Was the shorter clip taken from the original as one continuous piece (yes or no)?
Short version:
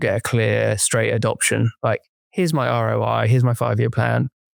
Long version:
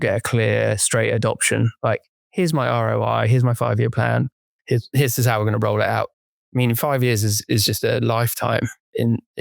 yes